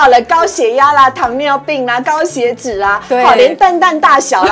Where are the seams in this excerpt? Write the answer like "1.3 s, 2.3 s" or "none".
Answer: none